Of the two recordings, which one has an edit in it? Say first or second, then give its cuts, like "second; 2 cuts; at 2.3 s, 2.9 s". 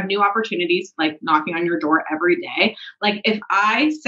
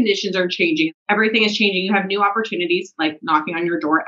second; 1 cut; at 0.9 s